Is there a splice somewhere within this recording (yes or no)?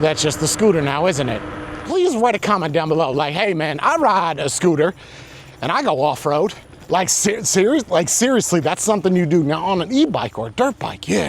yes